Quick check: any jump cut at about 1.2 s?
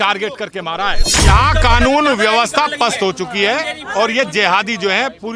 yes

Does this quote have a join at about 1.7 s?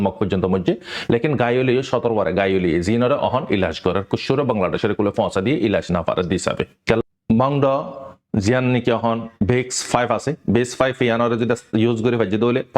no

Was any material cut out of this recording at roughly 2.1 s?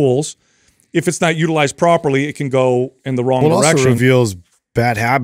no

